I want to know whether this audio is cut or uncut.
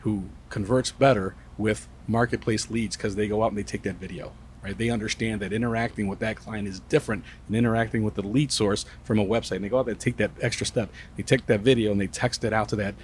uncut